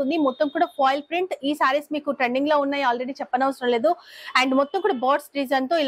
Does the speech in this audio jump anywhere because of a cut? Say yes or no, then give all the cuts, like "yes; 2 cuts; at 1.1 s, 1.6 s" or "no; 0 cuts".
no; 0 cuts